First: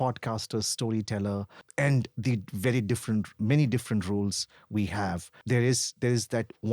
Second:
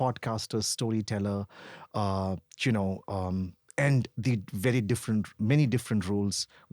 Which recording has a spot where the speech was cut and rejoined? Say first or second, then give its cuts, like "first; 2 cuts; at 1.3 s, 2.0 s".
first; 2 cuts; at 1.6 s, 5.4 s